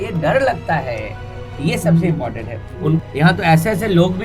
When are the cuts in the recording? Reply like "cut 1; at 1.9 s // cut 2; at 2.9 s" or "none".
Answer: cut 1; at 3.0 s